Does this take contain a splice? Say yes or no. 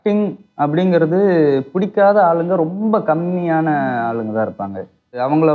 no